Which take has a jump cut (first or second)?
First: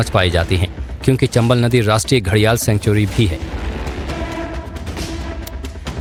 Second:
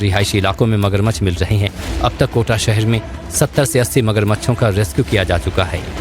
second